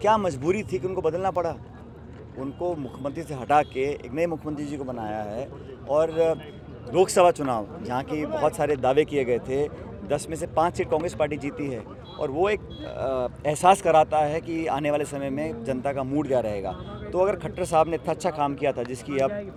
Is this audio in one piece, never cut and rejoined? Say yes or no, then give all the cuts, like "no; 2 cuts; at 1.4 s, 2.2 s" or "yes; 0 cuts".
yes; 0 cuts